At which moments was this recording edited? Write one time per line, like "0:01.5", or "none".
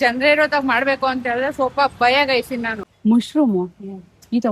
0:02.8